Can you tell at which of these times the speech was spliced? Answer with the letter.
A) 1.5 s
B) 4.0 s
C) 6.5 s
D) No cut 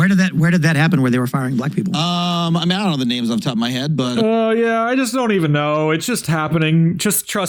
D